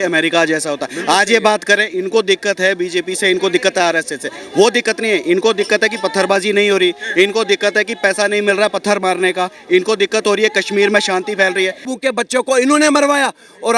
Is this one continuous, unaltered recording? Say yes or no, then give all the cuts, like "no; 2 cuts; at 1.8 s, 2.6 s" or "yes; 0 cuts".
no; 1 cut; at 11.8 s